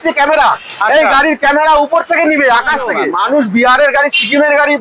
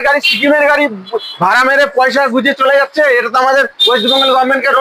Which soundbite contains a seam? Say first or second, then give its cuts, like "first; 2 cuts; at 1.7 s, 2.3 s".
first; 1 cut; at 3.0 s